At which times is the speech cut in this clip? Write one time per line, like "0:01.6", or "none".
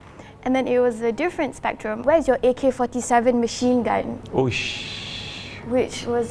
0:02.0